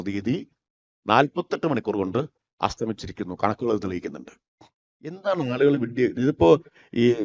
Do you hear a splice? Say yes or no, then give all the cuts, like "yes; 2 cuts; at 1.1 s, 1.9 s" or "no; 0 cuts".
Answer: yes; 1 cut; at 5.2 s